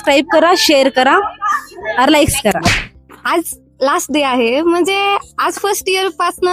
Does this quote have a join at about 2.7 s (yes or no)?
yes